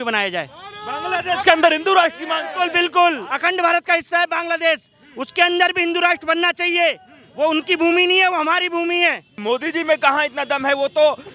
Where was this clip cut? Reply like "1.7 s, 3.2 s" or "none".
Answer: 3.3 s, 9.4 s